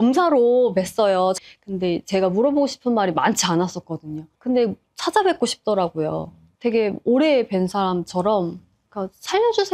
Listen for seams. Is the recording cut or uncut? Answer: uncut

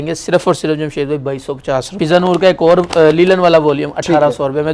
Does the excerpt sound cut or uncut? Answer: cut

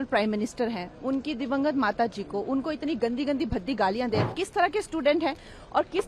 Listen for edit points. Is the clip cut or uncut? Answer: cut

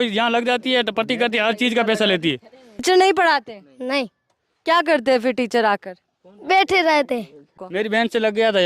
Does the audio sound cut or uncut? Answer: cut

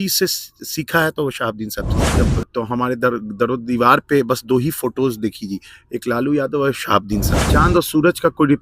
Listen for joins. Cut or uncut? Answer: cut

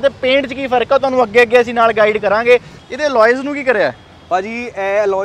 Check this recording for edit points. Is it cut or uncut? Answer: cut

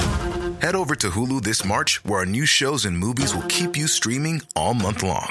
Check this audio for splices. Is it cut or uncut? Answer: uncut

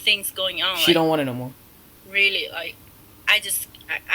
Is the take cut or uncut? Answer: uncut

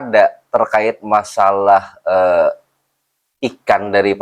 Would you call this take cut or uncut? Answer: uncut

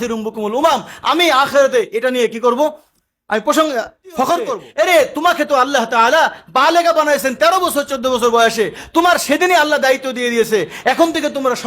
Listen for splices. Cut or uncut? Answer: cut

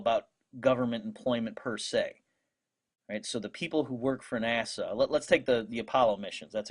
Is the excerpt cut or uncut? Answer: uncut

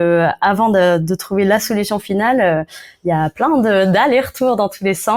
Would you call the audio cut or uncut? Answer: uncut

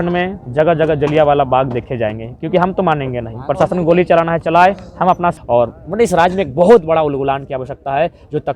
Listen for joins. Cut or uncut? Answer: cut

